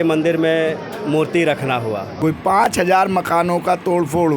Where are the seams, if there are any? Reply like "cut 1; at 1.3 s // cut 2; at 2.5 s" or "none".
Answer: cut 1; at 2.2 s